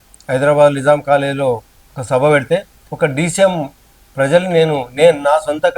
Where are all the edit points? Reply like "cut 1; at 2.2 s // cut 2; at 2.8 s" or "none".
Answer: cut 1; at 2.8 s